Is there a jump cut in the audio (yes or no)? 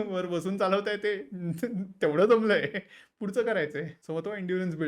yes